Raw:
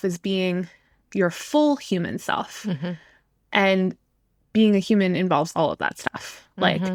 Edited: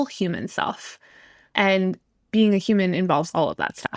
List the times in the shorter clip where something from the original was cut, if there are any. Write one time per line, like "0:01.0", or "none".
0:00.9
0:02.1

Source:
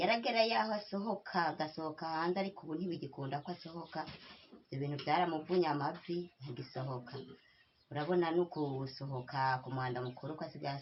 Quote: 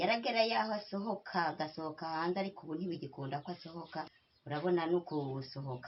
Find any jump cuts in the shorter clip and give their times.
0:04.3

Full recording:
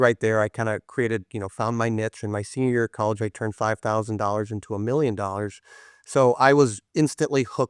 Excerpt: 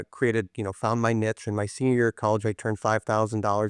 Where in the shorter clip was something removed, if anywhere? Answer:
none

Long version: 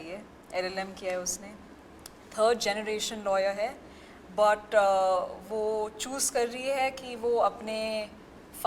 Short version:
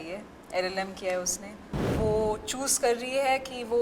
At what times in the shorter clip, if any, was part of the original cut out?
0:01.9

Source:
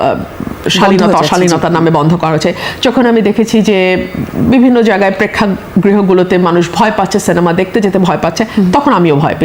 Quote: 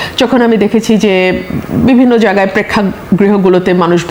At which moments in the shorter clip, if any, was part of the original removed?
none

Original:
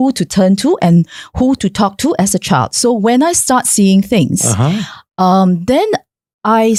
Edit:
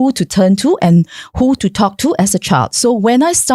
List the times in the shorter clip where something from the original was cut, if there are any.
none

